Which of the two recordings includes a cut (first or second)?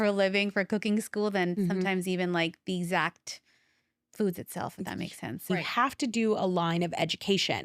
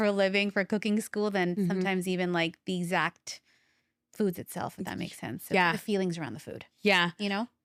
first